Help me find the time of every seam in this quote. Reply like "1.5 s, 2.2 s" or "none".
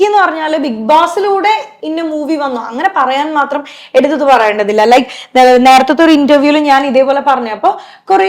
none